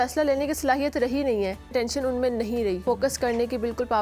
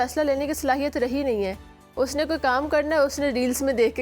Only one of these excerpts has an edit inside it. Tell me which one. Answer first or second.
first